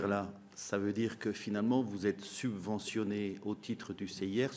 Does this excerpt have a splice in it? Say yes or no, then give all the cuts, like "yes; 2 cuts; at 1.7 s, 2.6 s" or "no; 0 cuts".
no; 0 cuts